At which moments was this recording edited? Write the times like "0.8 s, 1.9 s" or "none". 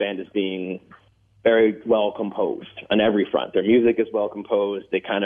none

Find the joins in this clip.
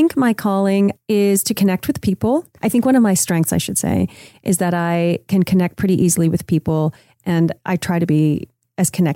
1.0 s, 2.5 s, 7.6 s

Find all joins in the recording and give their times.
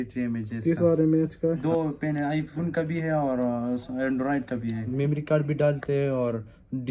1.6 s, 4.9 s

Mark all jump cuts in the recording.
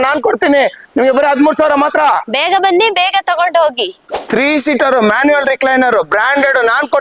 none

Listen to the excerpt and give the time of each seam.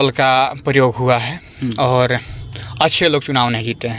none

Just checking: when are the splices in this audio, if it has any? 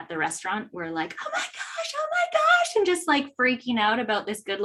none

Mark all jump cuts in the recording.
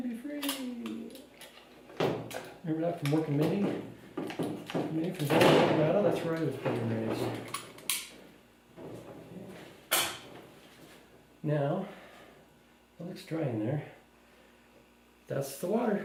none

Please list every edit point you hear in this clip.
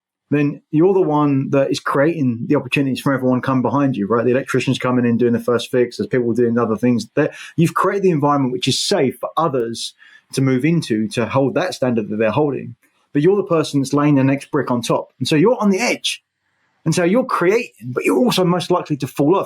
none

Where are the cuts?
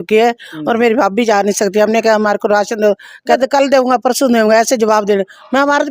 3.4 s

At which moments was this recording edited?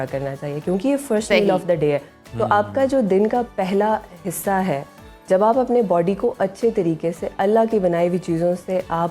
none

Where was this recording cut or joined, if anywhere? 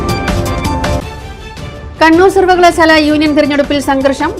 none

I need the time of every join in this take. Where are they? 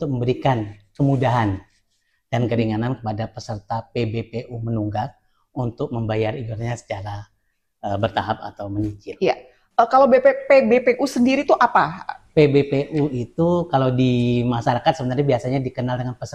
none

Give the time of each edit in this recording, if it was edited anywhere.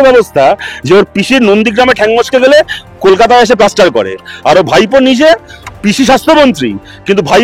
none

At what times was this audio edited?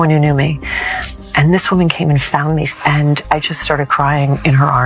2.7 s

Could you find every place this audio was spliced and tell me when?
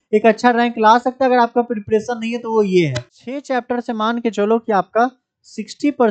3.0 s

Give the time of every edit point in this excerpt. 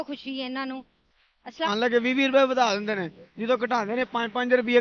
1.7 s

